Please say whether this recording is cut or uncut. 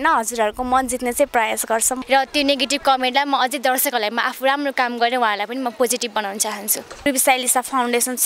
cut